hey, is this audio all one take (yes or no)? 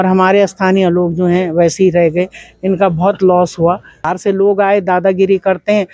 no